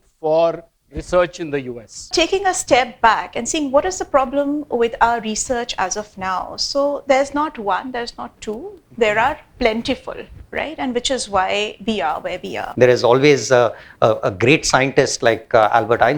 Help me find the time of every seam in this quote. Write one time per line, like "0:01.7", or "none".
0:02.1
0:12.6